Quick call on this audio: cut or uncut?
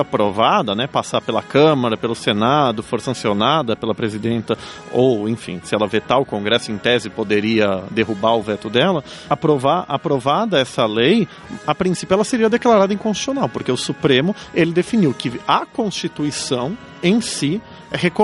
cut